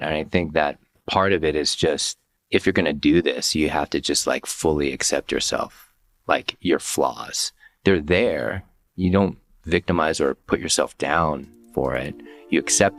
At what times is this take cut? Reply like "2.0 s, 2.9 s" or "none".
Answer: none

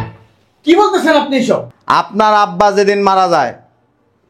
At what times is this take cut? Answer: 1.7 s

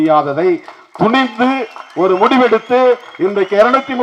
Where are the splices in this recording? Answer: none

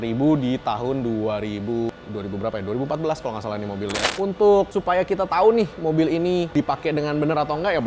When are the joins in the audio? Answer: 1.9 s, 4.0 s, 6.5 s

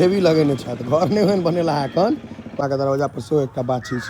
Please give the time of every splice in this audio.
2.4 s

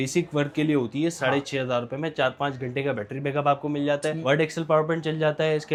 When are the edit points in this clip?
none

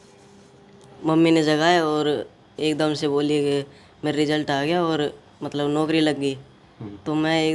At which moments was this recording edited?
1.0 s

